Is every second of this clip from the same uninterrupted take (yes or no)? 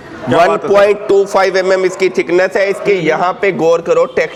yes